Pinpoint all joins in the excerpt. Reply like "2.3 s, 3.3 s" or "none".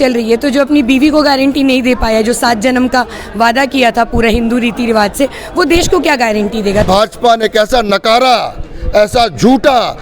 6.8 s